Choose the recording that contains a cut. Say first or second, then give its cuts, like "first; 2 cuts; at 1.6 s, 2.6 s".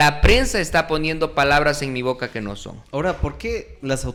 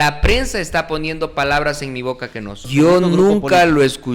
second; 1 cut; at 2.7 s